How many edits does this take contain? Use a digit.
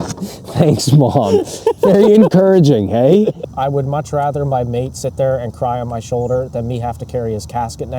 1